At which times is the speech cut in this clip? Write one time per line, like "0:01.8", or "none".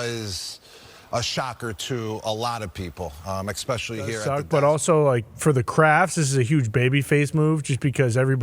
0:04.3